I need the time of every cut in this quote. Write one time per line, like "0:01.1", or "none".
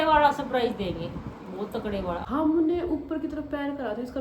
0:02.2